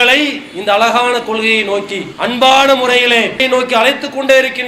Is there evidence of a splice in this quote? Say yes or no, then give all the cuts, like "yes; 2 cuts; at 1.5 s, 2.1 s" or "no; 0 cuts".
yes; 2 cuts; at 2.0 s, 3.4 s